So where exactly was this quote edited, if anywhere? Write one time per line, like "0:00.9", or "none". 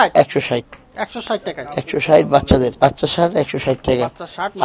0:02.7